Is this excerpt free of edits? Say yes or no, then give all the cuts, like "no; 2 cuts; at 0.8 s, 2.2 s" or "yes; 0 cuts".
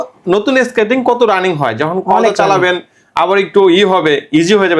yes; 0 cuts